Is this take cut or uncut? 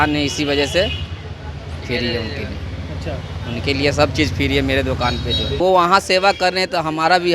cut